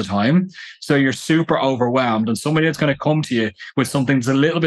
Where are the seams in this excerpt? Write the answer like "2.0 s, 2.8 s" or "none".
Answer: none